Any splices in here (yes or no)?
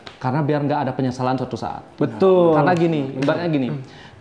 no